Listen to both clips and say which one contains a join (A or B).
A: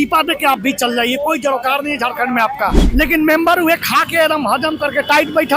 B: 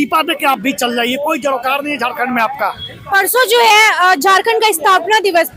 A